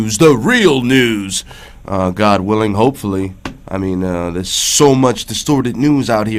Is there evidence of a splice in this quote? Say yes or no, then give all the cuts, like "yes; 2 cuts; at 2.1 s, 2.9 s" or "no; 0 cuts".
no; 0 cuts